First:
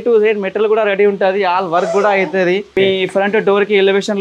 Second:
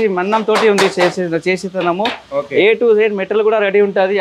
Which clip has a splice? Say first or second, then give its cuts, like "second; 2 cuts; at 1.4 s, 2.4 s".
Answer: first; 1 cut; at 2.7 s